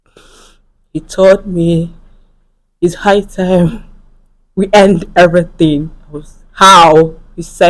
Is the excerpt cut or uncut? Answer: uncut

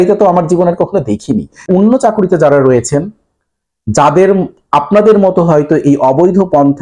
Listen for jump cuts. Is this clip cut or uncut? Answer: cut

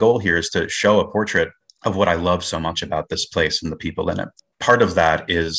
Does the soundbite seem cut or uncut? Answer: cut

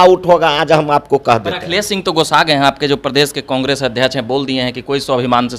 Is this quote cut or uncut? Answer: uncut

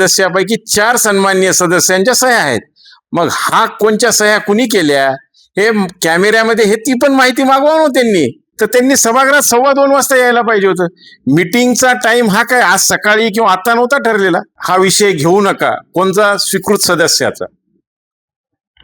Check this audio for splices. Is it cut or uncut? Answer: cut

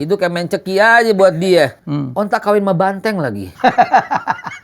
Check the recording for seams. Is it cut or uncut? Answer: cut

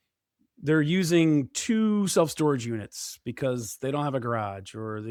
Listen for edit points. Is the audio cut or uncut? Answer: uncut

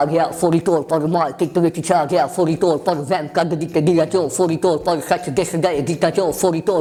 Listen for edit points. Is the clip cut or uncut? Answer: uncut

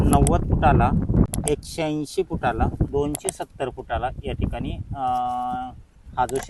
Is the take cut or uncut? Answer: cut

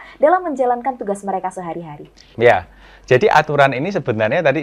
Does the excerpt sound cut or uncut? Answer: uncut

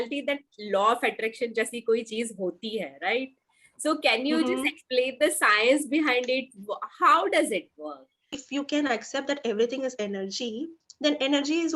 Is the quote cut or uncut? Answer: cut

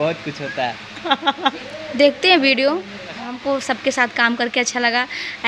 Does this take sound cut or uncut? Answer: cut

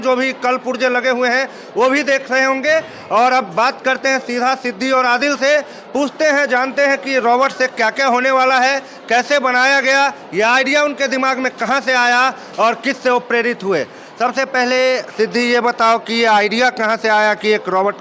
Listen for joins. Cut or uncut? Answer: uncut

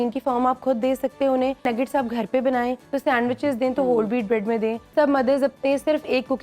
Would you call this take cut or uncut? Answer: cut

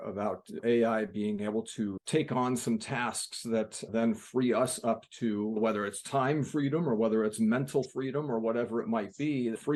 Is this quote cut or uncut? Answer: uncut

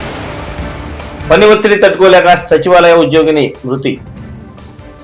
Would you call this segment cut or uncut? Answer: uncut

